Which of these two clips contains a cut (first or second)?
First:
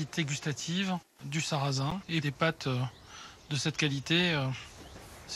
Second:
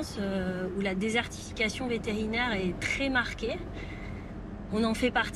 first